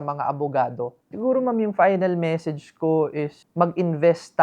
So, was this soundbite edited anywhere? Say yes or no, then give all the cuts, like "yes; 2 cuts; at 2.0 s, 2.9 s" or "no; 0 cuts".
yes; 2 cuts; at 1.0 s, 3.4 s